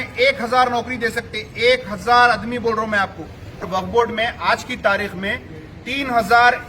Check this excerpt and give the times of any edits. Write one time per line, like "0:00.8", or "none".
0:03.6